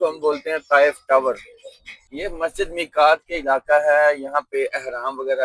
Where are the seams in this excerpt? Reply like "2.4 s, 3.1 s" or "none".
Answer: 2.2 s